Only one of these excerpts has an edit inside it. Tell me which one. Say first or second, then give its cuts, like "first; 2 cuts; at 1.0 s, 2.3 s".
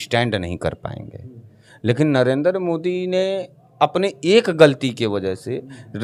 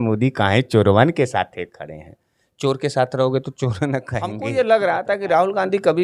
second; 1 cut; at 4.4 s